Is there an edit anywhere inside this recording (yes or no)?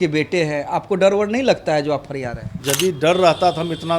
yes